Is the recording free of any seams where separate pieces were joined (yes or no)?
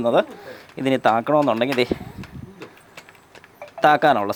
yes